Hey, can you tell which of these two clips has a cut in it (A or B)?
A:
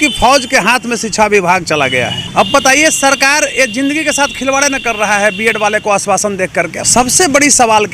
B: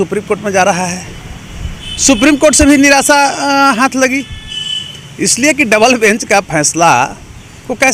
A